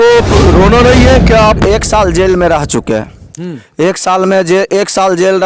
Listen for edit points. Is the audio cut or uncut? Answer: cut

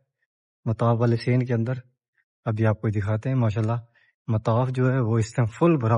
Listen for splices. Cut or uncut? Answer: uncut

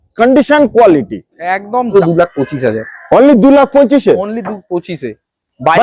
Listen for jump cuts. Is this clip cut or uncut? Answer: cut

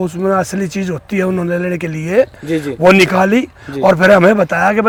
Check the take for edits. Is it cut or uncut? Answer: uncut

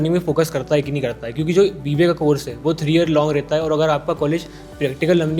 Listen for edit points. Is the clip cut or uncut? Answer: uncut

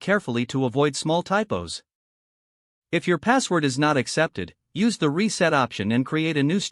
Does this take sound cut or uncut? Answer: uncut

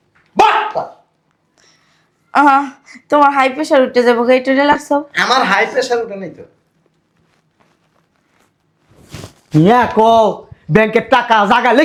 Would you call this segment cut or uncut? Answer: uncut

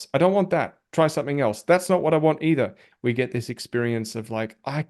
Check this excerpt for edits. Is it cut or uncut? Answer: cut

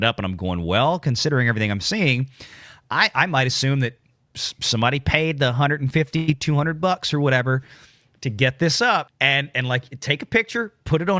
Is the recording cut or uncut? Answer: cut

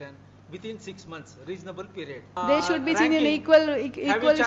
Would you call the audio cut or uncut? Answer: cut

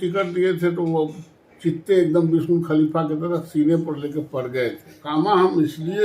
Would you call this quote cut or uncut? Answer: cut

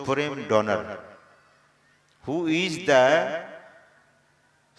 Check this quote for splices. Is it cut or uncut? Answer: uncut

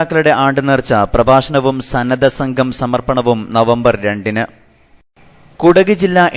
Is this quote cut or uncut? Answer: uncut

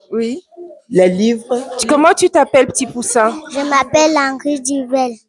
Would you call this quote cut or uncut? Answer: cut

